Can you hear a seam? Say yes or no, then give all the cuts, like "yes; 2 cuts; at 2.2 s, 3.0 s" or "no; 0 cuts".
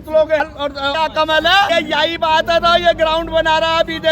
yes; 2 cuts; at 0.8 s, 1.7 s